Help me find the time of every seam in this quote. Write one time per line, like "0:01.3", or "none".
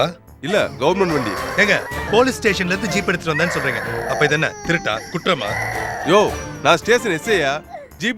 none